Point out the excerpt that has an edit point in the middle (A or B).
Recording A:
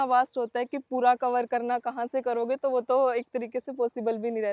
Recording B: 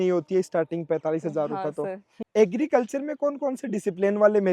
B